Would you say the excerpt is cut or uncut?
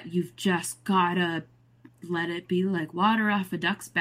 uncut